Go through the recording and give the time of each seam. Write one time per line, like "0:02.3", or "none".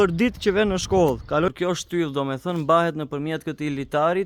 0:01.5